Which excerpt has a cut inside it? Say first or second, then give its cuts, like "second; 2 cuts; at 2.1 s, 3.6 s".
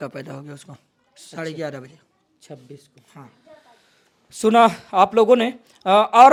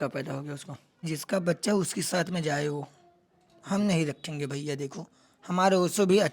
second; 1 cut; at 1.1 s